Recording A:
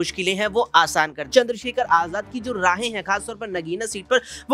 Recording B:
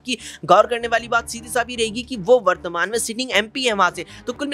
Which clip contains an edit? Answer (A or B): A